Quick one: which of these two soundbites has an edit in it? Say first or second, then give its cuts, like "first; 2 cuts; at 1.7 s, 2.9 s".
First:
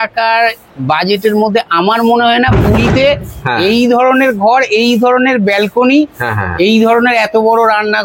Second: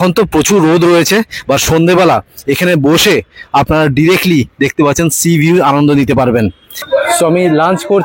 second; 1 cut; at 6.7 s